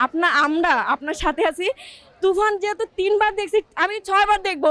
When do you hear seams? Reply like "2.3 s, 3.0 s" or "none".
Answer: 3.7 s